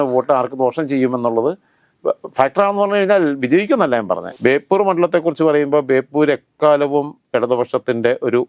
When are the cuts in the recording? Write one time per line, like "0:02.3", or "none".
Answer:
0:04.2